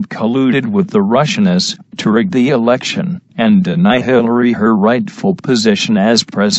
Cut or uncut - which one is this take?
uncut